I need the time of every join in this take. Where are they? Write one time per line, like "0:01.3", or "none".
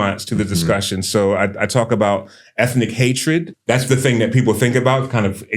0:03.5